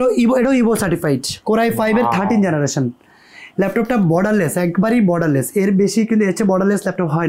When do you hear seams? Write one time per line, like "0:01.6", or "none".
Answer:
none